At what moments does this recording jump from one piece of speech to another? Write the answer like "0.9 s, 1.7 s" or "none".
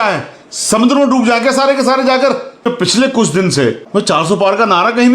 2.7 s, 3.8 s